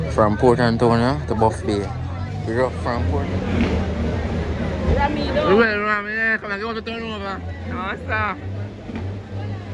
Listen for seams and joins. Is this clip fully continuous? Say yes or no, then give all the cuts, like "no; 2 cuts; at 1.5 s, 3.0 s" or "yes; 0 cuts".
no; 1 cut; at 3.0 s